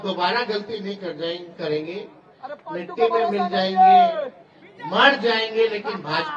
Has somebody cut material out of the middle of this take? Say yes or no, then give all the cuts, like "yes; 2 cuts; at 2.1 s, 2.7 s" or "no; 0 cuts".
no; 0 cuts